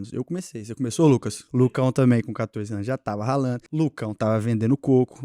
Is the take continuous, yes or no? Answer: no